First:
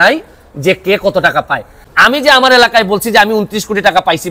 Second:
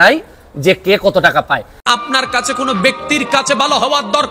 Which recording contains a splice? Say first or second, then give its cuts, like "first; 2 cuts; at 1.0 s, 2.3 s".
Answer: first; 1 cut; at 1.8 s